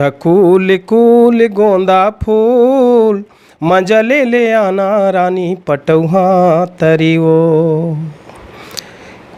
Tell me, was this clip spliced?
no; 0 cuts

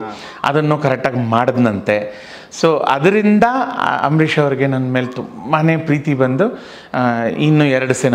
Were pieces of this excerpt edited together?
no; 0 cuts

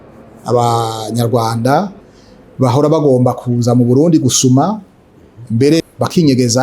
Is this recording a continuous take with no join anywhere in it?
no; 2 cuts; at 2.0 s, 5.8 s

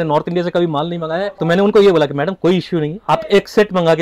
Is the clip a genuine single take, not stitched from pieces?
no; 1 cut; at 1.3 s

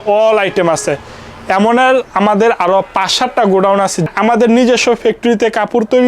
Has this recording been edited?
yes; 1 cut; at 4.1 s

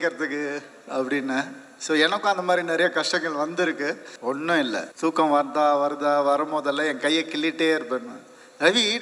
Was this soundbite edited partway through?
yes; 2 cuts; at 4.1 s, 4.9 s

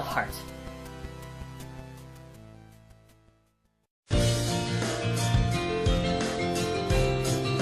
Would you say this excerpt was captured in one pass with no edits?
no; 1 cut; at 6.4 s

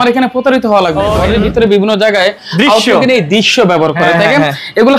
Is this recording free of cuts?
no; 1 cut; at 1.2 s

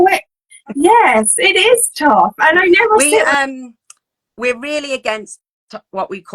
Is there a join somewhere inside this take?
yes; 1 cut; at 3.3 s

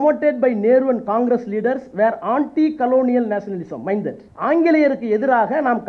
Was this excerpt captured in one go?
no; 1 cut; at 4.2 s

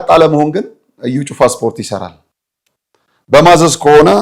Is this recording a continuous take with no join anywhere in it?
yes; 0 cuts

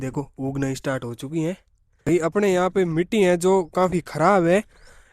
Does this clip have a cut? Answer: yes; 1 cut; at 1.9 s

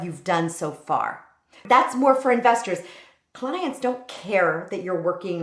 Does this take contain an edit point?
yes; 1 cut; at 1.6 s

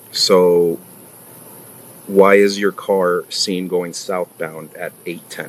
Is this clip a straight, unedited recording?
yes; 0 cuts

